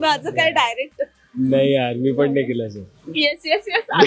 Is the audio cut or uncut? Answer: uncut